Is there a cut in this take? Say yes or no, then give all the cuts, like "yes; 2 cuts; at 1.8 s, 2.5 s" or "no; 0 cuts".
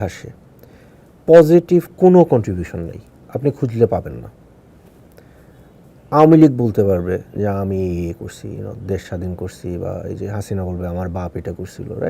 yes; 1 cut; at 5.4 s